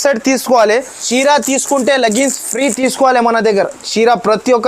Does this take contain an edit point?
yes; 1 cut; at 1.0 s

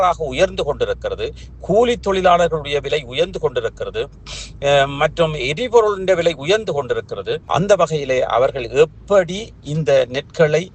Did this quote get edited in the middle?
no; 0 cuts

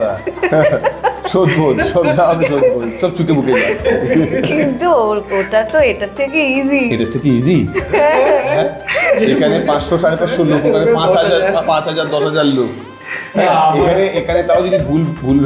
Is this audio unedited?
yes; 0 cuts

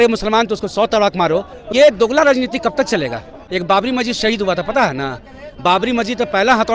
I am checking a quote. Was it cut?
yes; 2 cuts; at 1.6 s, 3.5 s

